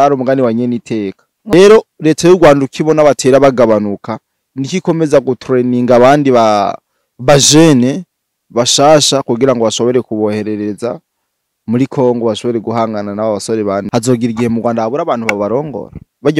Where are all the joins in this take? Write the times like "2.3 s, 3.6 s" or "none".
1.5 s, 13.9 s